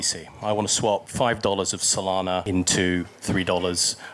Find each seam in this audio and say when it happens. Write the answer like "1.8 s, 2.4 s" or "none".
1.1 s, 2.4 s

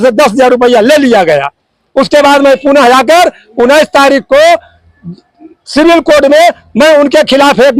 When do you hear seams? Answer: none

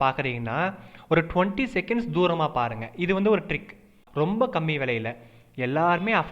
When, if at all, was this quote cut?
4.0 s

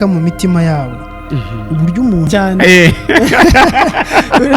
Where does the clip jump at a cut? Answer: 2.3 s

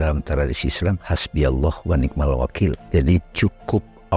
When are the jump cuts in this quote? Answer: 2.8 s

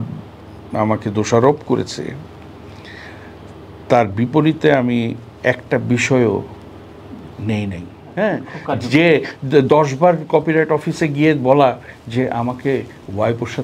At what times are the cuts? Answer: 8.0 s

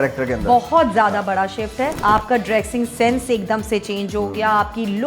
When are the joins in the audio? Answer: 2.0 s

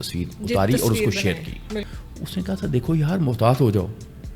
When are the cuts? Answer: 1.9 s

